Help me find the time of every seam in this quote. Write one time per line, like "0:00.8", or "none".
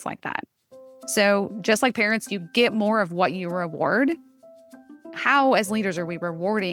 none